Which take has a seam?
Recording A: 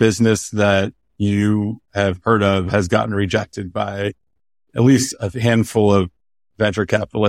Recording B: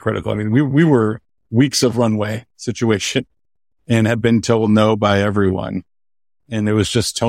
B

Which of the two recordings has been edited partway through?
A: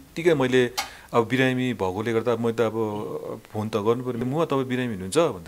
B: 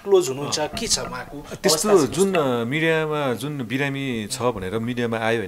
A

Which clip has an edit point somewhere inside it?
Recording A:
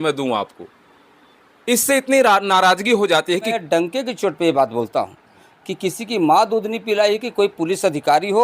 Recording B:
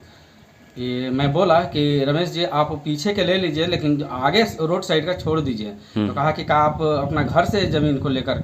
A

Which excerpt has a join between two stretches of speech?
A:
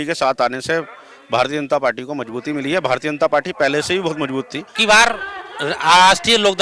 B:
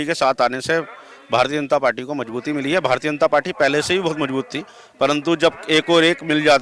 A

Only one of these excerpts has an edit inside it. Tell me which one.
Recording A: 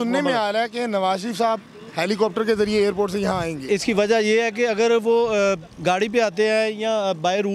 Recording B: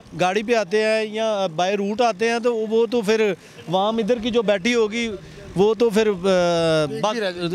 A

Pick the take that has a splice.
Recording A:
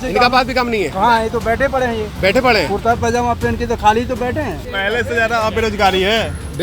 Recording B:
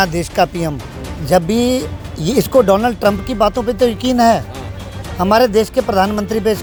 A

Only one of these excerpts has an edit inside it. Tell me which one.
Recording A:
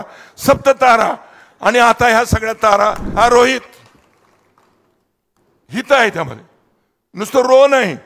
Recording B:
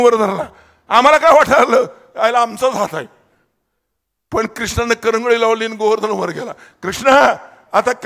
A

